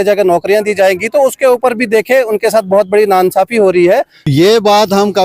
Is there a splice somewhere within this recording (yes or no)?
yes